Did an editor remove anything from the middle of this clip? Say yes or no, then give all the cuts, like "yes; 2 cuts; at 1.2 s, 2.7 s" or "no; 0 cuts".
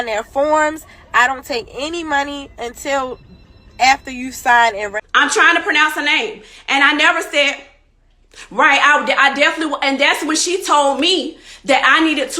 yes; 1 cut; at 4.9 s